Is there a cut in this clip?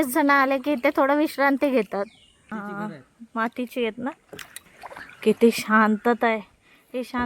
yes; 2 cuts; at 2.5 s, 4.7 s

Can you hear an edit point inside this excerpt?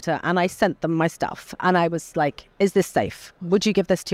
no; 0 cuts

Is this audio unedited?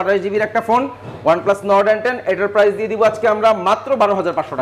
yes; 0 cuts

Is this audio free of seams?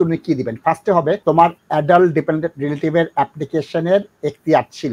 no; 1 cut; at 1.2 s

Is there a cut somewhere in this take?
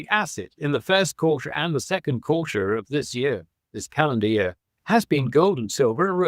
no; 0 cuts

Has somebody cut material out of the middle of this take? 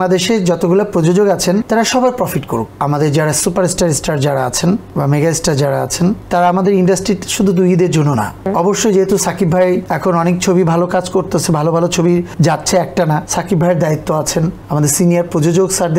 yes; 9 cuts; at 1.6 s, 2.7 s, 4.9 s, 6.2 s, 8.4 s, 9.9 s, 12.3 s, 13.3 s, 14.6 s

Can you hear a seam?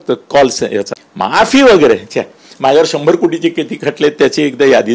yes; 1 cut; at 1.0 s

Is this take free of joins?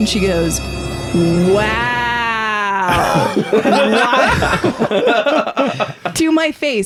yes; 0 cuts

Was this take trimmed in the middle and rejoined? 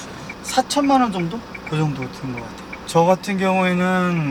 no; 0 cuts

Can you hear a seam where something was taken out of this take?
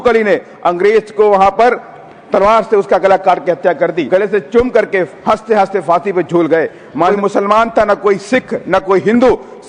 yes; 2 cuts; at 4.0 s, 7.1 s

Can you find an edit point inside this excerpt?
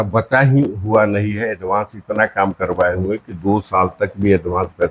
no; 0 cuts

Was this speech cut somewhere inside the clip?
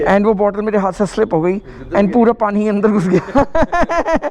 no; 0 cuts

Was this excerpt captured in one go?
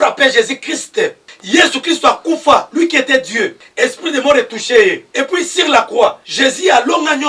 no; 4 cuts; at 1.3 s, 3.6 s, 5.1 s, 6.3 s

